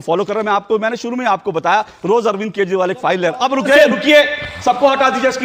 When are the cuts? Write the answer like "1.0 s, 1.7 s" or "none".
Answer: none